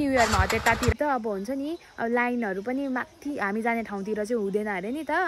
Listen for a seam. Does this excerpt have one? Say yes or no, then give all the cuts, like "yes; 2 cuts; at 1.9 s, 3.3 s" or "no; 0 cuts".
yes; 1 cut; at 0.9 s